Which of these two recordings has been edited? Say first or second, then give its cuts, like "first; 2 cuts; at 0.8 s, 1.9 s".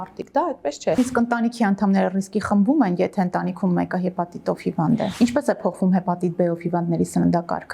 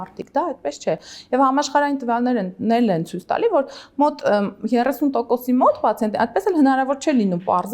first; 2 cuts; at 1.0 s, 5.1 s